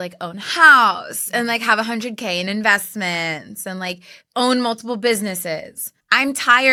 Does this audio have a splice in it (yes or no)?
no